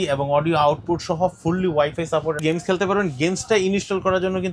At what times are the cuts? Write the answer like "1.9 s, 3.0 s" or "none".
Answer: 2.4 s